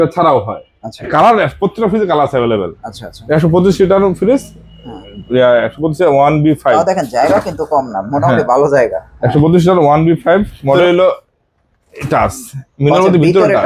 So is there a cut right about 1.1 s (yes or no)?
yes